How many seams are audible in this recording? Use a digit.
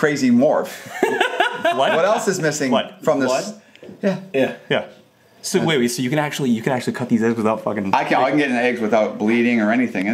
0